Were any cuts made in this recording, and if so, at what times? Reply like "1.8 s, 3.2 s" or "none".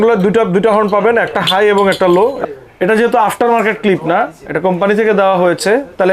2.4 s